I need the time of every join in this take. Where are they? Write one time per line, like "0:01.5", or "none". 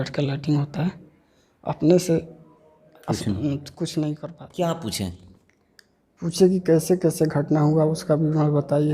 0:04.3